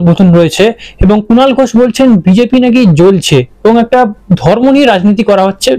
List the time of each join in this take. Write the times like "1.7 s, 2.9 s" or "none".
none